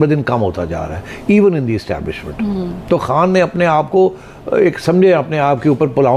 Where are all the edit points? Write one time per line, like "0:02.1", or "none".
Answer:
none